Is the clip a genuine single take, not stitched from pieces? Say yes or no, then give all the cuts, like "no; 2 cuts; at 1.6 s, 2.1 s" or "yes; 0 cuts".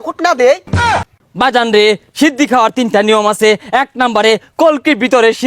no; 1 cut; at 0.9 s